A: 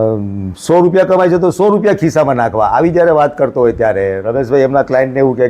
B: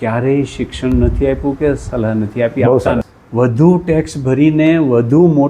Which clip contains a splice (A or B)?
B